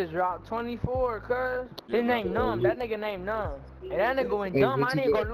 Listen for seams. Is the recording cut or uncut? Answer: cut